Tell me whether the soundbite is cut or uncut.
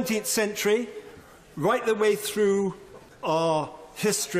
uncut